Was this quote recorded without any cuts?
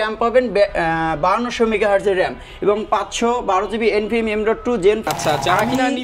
no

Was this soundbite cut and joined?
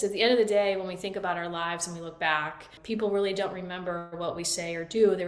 yes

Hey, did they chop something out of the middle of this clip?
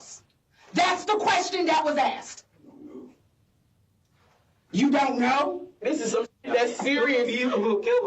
yes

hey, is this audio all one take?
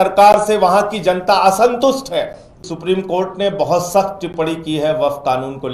no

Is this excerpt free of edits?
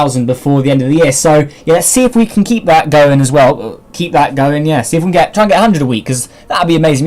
no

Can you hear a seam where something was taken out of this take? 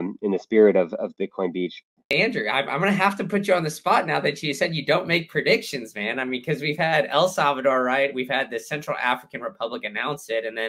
yes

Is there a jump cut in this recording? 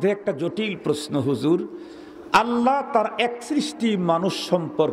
no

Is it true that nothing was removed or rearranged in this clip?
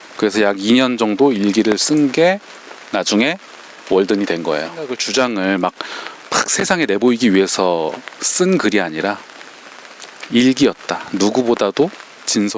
no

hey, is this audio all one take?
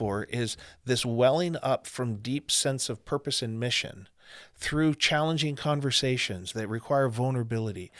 yes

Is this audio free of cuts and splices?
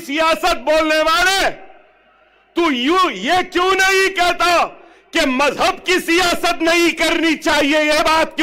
yes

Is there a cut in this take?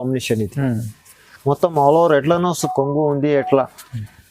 yes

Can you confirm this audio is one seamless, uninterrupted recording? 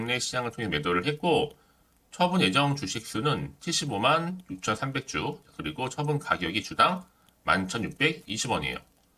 yes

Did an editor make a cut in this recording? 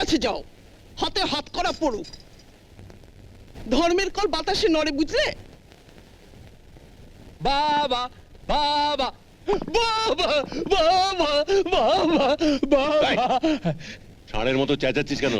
no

